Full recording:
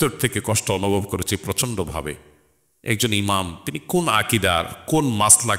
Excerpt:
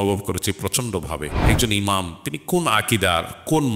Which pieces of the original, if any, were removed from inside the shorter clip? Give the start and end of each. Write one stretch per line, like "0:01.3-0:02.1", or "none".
0:02.2-0:02.8